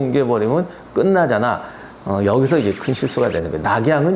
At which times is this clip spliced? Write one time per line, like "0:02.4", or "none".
none

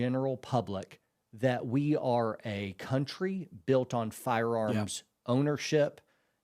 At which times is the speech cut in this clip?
none

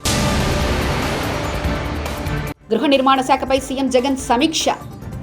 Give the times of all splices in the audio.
0:02.5

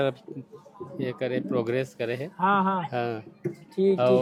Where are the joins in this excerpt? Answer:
none

